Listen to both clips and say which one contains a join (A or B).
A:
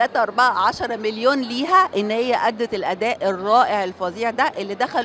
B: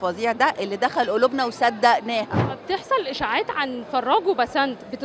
B